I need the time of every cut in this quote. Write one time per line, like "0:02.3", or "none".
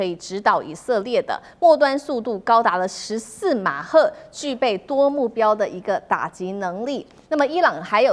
none